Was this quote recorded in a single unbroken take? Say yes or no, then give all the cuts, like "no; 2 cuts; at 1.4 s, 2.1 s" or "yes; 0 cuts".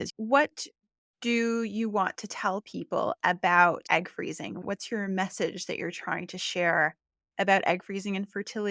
no; 1 cut; at 3.8 s